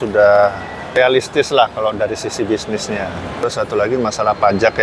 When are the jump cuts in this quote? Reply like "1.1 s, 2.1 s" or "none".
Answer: 1.0 s, 3.4 s